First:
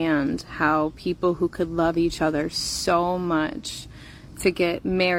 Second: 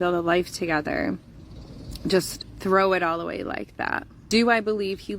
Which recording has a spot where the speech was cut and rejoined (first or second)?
second